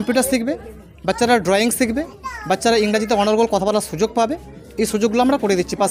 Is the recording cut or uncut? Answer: uncut